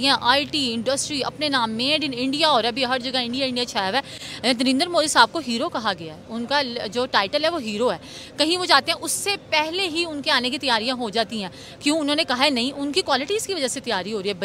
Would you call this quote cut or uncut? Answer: uncut